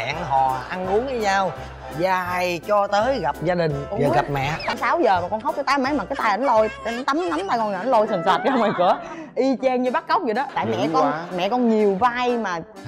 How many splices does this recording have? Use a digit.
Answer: 2